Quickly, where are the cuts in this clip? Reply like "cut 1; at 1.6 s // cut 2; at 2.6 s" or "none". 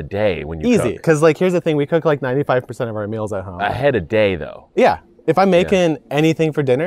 cut 1; at 1.0 s